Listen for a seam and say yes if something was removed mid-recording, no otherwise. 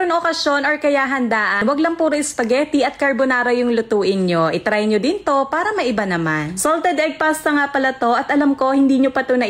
yes